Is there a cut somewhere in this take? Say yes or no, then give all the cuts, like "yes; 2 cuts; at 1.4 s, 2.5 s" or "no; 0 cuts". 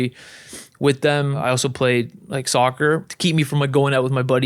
yes; 2 cuts; at 1.4 s, 3.1 s